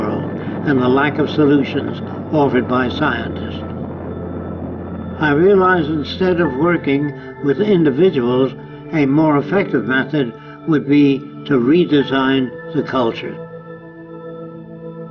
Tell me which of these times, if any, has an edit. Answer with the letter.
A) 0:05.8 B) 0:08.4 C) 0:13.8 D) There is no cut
A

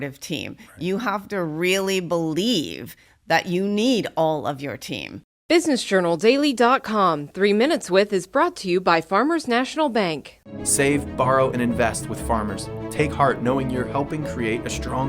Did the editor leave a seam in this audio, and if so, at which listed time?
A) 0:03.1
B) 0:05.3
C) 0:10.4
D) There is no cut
B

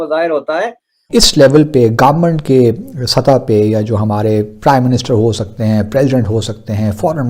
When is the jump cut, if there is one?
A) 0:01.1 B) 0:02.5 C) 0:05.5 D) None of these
A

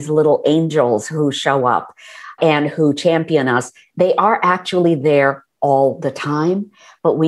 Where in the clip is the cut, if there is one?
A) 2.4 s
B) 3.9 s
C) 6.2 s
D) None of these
A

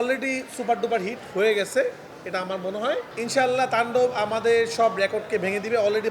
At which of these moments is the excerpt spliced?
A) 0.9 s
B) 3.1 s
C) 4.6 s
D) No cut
B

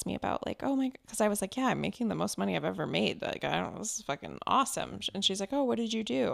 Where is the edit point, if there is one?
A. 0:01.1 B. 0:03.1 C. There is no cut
C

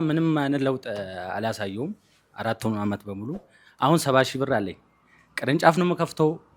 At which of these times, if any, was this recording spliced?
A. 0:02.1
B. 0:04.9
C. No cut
C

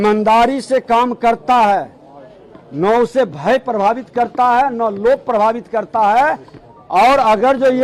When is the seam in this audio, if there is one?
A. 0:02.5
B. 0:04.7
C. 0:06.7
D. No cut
D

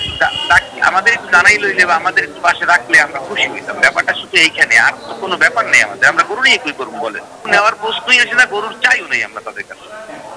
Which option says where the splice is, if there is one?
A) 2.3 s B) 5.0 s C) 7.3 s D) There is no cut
D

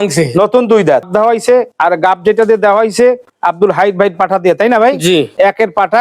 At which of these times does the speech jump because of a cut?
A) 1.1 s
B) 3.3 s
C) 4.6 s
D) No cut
A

